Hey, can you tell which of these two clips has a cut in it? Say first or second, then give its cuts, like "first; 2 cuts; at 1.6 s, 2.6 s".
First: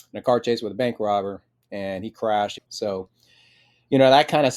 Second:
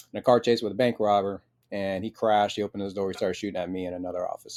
first; 1 cut; at 2.5 s